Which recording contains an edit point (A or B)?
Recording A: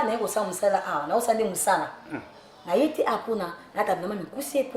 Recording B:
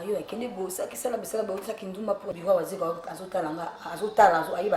B